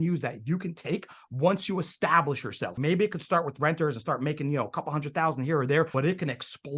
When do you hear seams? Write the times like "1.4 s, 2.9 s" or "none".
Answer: 2.7 s, 5.9 s